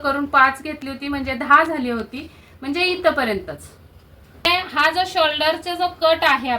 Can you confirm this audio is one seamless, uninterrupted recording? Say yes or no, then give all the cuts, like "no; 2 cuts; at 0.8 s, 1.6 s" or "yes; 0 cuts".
no; 1 cut; at 4.5 s